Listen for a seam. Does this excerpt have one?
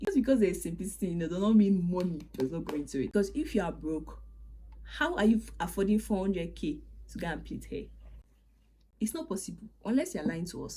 yes; 1 cut; at 3.1 s

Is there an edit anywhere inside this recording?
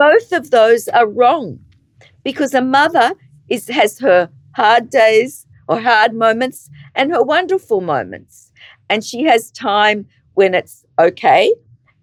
no; 0 cuts

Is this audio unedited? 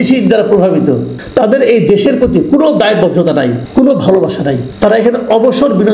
no; 3 cuts; at 1.2 s, 3.6 s, 4.7 s

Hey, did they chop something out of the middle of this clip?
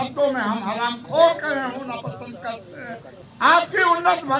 yes; 1 cut; at 3.1 s

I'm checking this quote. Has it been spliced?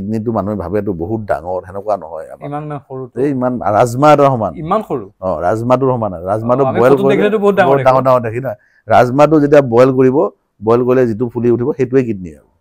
no; 0 cuts

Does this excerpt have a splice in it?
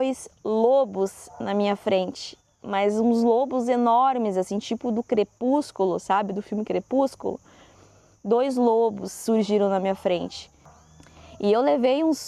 yes; 1 cut; at 11.0 s

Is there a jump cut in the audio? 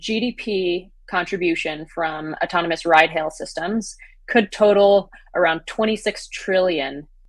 no; 0 cuts

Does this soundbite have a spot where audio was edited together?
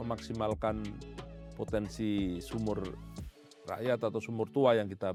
no; 0 cuts

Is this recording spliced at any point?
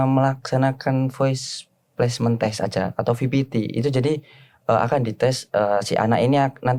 no; 0 cuts

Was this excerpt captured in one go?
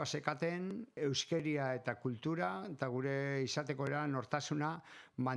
no; 1 cut; at 0.9 s

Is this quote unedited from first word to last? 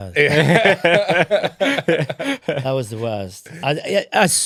yes; 0 cuts

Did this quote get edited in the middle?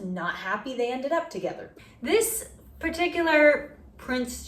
yes; 1 cut; at 1.7 s

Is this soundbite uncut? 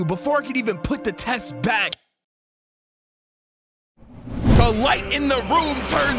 yes; 0 cuts

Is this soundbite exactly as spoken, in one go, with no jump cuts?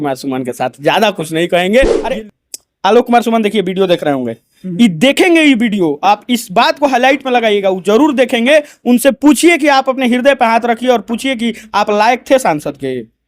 no; 1 cut; at 2.0 s

